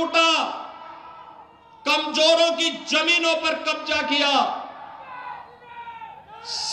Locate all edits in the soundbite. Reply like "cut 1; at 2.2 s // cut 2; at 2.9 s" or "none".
none